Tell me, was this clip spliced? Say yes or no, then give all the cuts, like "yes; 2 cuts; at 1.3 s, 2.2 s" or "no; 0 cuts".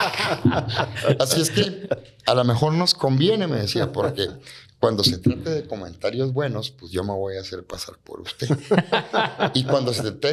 no; 0 cuts